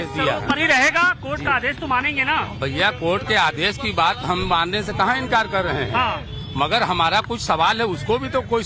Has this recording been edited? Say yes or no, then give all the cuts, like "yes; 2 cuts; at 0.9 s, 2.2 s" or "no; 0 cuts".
no; 0 cuts